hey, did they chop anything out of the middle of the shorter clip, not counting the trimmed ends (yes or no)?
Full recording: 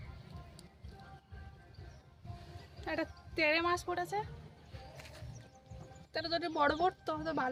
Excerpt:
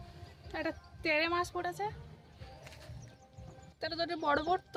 no